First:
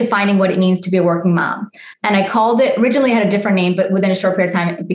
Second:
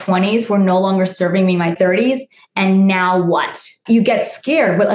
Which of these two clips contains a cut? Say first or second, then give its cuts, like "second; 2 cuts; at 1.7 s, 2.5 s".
second; 2 cuts; at 1.7 s, 3.7 s